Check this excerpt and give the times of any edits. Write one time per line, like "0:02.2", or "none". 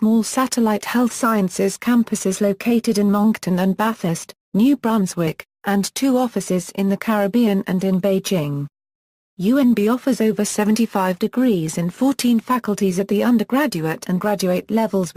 0:10.3